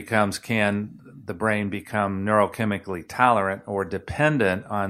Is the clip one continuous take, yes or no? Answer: yes